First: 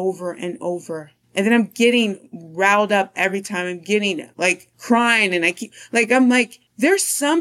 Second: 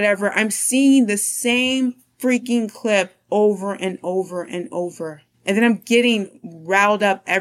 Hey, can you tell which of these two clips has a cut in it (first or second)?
first